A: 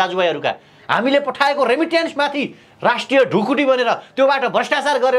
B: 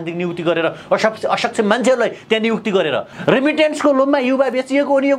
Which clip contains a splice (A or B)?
B